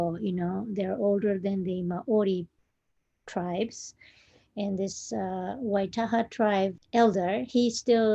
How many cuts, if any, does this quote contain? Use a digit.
1